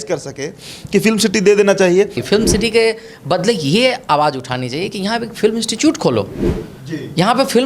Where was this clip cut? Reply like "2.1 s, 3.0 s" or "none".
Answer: 2.2 s